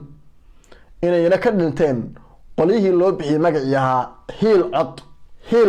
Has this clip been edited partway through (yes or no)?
no